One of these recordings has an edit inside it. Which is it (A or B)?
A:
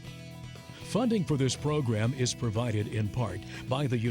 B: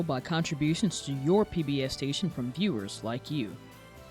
A